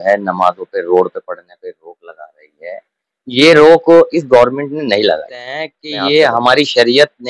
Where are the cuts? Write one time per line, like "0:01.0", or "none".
0:05.8